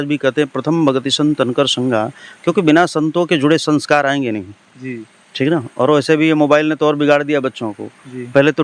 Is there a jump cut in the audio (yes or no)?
no